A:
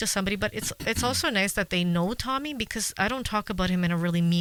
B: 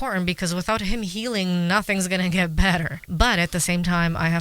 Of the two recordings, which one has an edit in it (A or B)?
B